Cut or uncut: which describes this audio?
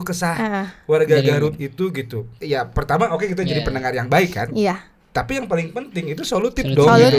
cut